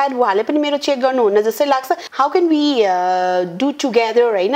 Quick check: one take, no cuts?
no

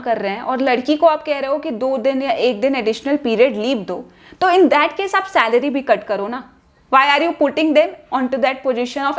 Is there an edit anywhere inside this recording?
no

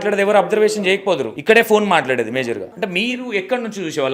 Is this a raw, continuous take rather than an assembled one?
no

